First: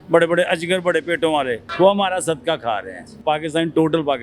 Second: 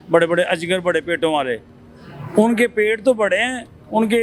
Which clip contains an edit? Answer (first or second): first